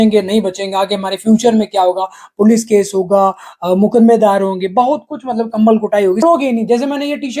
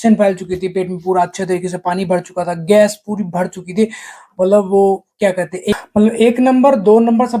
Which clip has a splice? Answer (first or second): first